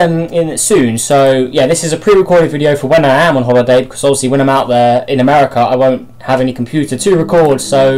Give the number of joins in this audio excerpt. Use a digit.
1